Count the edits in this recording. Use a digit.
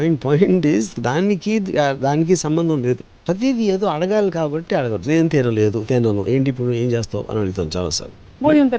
1